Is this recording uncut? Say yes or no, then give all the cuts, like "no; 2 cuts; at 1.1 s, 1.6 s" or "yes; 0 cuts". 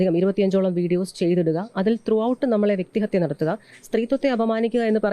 yes; 0 cuts